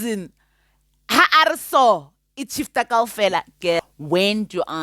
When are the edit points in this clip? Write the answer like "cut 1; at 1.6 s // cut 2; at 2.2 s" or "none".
cut 1; at 3.8 s